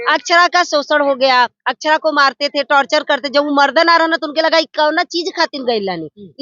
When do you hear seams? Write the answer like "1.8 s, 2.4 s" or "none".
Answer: none